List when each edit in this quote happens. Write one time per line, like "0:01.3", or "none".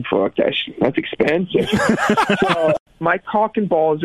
0:02.9